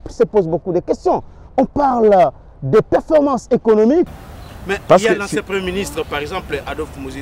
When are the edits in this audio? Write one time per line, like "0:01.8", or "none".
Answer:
0:04.1